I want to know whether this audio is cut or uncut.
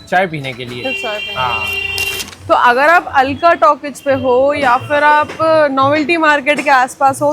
cut